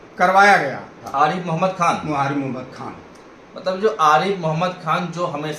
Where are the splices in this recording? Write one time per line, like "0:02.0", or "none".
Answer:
0:01.0